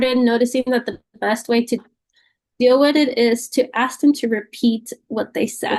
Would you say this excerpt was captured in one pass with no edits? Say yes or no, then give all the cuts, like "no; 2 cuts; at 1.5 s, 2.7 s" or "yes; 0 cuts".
yes; 0 cuts